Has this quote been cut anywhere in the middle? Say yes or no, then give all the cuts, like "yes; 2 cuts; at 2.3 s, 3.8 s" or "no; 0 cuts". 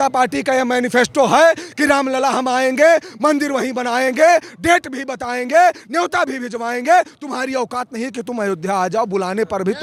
no; 0 cuts